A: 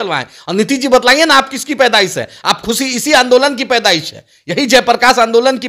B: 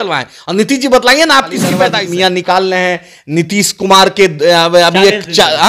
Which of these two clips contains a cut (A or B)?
B